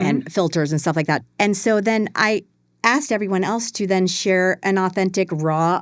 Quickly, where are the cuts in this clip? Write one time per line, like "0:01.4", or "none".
0:01.2